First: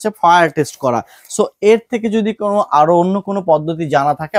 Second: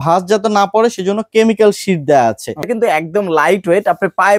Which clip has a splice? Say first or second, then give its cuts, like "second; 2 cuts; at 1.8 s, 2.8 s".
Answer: second; 1 cut; at 2.6 s